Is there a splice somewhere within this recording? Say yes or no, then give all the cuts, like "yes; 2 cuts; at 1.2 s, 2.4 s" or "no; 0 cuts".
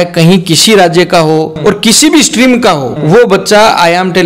yes; 2 cuts; at 1.5 s, 2.9 s